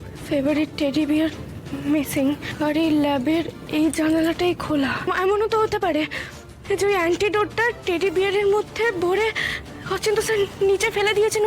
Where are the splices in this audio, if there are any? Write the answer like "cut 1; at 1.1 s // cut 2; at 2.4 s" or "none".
cut 1; at 2.5 s // cut 2; at 3.6 s // cut 3; at 5.1 s // cut 4; at 7.8 s

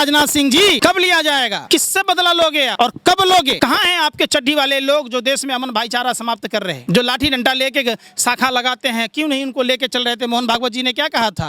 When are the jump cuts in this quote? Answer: cut 1; at 0.8 s // cut 2; at 1.6 s // cut 3; at 2.7 s // cut 4; at 3.5 s // cut 5; at 6.8 s

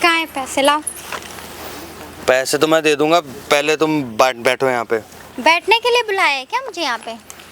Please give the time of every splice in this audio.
none

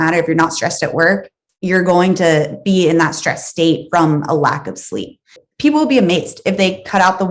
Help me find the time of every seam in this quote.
cut 1; at 5.4 s

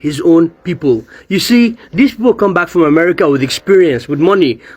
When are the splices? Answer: none

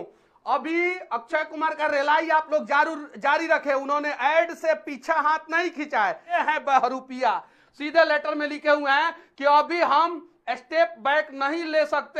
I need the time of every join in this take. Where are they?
cut 1; at 6.4 s

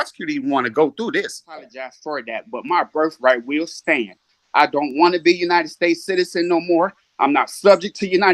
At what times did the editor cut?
cut 1; at 1.9 s

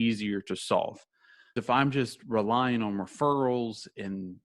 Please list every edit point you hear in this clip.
cut 1; at 1.6 s

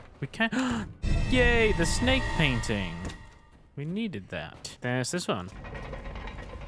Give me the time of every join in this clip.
cut 1; at 4.6 s

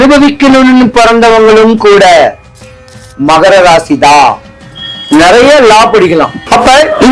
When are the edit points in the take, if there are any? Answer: cut 1; at 2.6 s

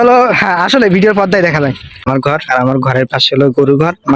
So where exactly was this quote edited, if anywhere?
cut 1; at 2.1 s

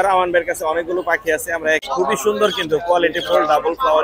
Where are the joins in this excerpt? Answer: cut 1; at 1.8 s

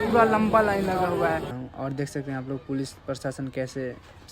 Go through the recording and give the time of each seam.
cut 1; at 1.6 s

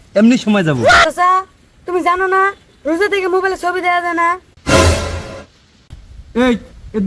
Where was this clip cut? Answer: cut 1; at 1.0 s

